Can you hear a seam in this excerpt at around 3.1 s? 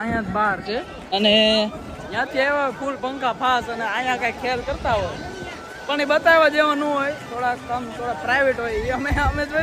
no; 1 cut; at 1.1 s

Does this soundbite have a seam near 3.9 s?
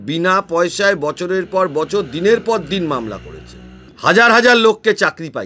yes; 1 cut; at 3.9 s

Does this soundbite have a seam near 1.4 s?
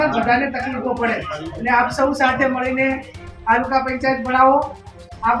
yes; 1 cut; at 1.4 s

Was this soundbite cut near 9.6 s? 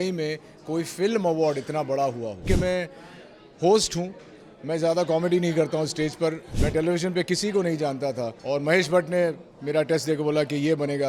no; 3 cuts; at 2.4 s, 6.5 s, 8.3 s

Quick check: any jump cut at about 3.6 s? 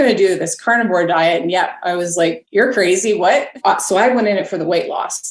yes; 2 cuts; at 2.4 s, 3.6 s

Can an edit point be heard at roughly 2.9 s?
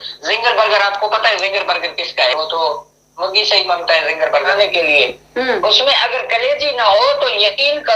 no; 1 cut; at 4.5 s

